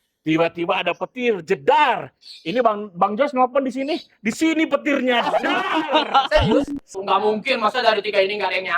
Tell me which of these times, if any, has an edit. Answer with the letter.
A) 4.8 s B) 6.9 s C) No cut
B